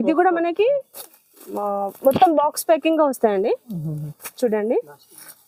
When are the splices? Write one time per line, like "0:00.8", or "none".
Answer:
none